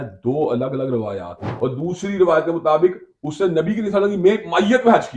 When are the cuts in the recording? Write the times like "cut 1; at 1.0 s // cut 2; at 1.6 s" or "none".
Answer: cut 1; at 1.5 s